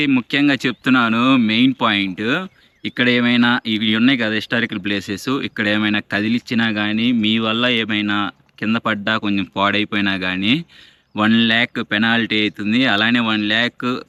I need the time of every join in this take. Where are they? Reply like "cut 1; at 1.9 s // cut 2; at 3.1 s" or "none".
none

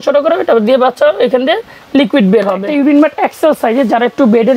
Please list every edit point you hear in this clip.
cut 1; at 2.6 s

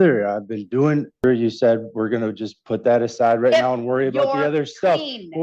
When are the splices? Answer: cut 1; at 1.2 s

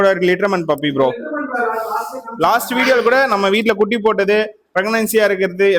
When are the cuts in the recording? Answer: none

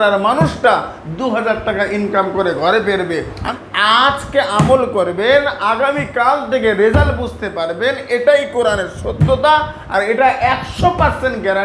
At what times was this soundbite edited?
cut 1; at 3.4 s

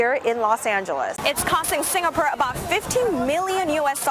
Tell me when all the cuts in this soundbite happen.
cut 1; at 1.2 s

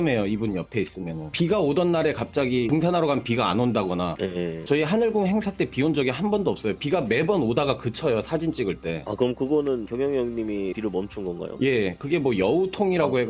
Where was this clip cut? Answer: none

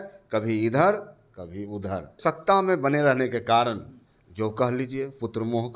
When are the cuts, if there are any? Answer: cut 1; at 2.1 s

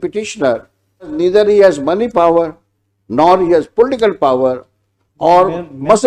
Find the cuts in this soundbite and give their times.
cut 1; at 1.1 s

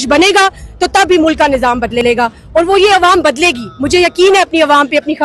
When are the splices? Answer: none

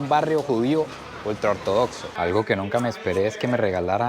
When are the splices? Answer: cut 1; at 2.1 s

